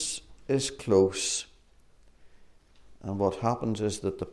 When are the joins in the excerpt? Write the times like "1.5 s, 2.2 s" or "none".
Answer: none